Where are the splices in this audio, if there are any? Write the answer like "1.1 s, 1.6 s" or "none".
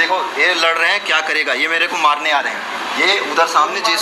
none